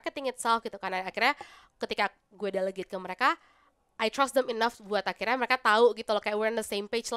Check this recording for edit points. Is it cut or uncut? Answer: uncut